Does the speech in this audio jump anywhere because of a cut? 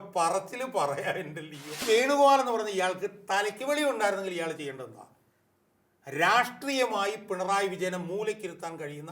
yes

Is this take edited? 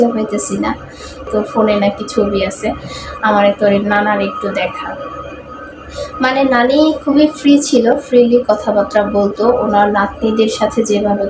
yes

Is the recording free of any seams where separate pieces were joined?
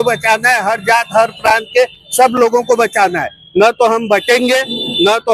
yes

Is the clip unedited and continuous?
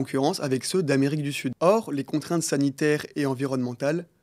no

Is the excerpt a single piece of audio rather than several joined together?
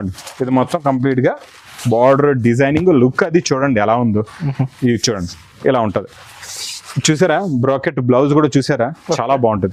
yes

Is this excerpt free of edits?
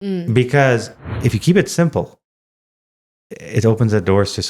no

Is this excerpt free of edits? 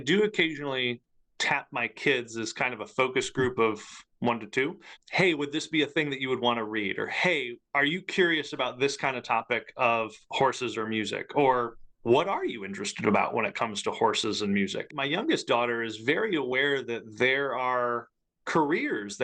no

